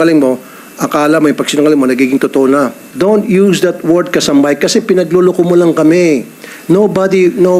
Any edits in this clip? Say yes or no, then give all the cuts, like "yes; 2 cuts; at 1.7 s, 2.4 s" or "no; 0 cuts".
yes; 1 cut; at 2.8 s